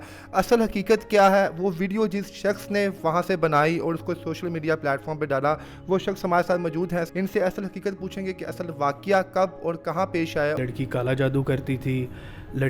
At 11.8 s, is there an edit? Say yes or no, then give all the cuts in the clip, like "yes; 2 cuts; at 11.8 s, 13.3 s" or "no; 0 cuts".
no; 2 cuts; at 7.1 s, 10.6 s